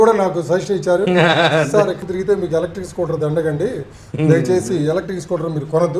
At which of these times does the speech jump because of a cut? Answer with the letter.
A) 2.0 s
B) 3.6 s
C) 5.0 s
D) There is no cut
A